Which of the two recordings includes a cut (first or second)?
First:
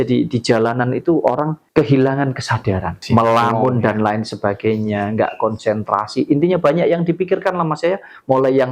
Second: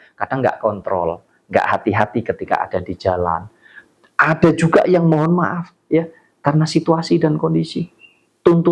first